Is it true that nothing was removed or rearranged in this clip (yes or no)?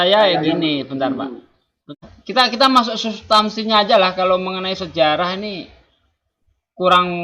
no